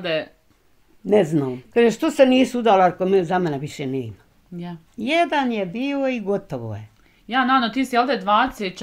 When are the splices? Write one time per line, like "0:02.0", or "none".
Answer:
0:01.6